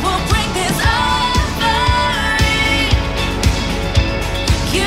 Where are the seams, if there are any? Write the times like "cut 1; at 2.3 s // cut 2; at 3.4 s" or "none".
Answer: none

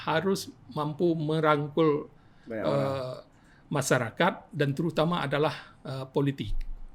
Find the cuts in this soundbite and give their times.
none

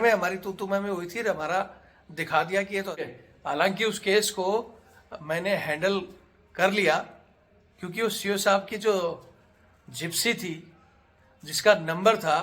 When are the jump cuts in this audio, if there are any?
cut 1; at 3.1 s

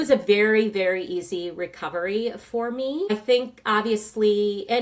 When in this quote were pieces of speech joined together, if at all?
cut 1; at 3.1 s

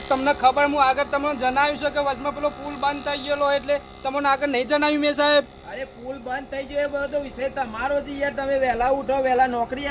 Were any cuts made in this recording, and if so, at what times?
none

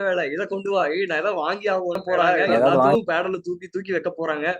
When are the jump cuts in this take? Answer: cut 1; at 2.9 s

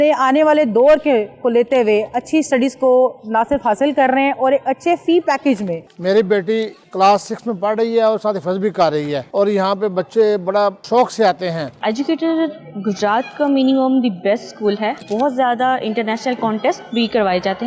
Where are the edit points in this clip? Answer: cut 1; at 5.8 s // cut 2; at 6.8 s // cut 3; at 9.3 s // cut 4; at 11.7 s // cut 5; at 15.0 s

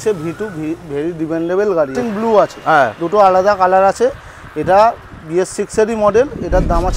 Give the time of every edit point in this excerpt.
cut 1; at 2.0 s

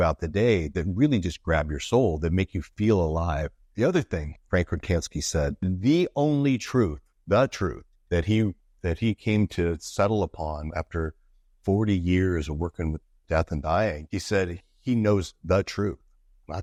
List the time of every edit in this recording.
none

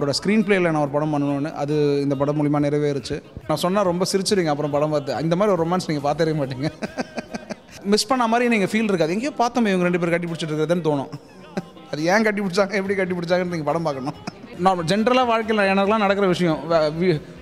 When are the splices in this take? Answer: cut 1; at 3.5 s // cut 2; at 7.8 s // cut 3; at 14.5 s

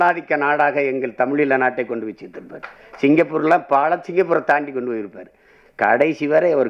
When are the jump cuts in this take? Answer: none

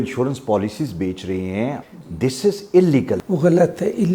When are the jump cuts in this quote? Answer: cut 1; at 1.8 s // cut 2; at 3.2 s

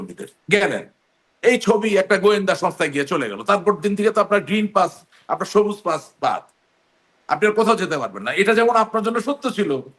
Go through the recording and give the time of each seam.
none

